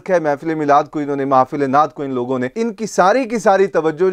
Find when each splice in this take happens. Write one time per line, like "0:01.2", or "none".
none